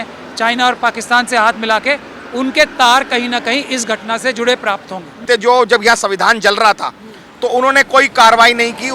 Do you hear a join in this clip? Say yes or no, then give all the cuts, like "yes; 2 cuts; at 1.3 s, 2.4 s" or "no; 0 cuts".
yes; 1 cut; at 5.1 s